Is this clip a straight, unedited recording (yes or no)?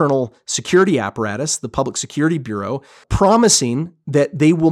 no